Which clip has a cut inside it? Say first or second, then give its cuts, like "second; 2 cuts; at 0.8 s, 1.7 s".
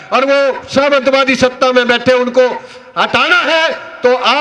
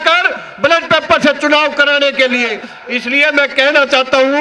second; 1 cut; at 2.6 s